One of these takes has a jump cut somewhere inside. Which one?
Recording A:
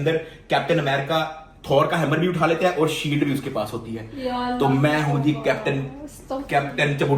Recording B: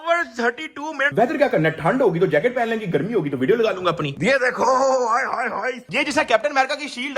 B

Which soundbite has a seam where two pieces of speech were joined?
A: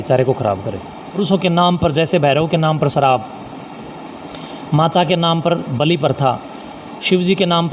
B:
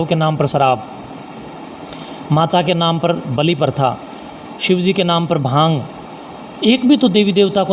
A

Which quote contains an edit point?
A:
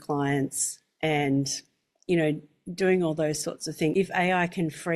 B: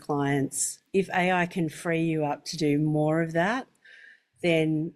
B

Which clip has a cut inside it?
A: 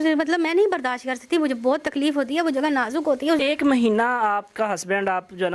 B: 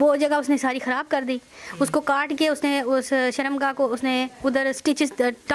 A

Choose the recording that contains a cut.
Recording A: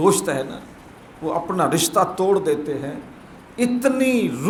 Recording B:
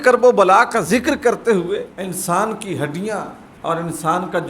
B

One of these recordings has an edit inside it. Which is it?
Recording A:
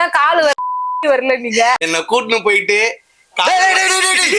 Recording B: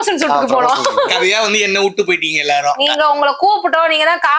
A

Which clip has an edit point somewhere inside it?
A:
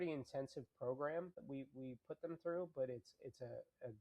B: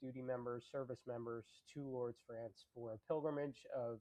A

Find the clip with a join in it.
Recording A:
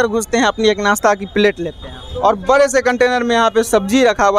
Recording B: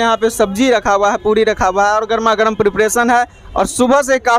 A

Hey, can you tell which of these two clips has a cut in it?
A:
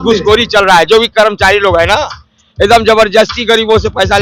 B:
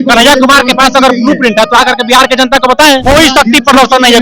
B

